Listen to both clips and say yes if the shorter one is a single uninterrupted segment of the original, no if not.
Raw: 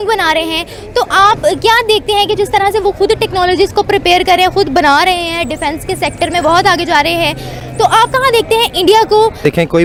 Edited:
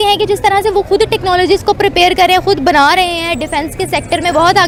yes